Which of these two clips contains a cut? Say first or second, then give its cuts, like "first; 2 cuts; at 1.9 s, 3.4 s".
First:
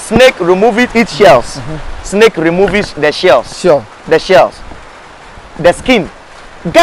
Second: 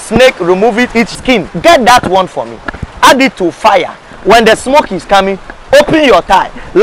second; 1 cut; at 1.1 s